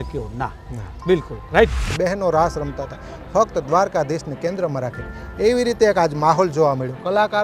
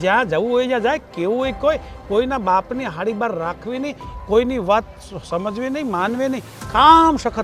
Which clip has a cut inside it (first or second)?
first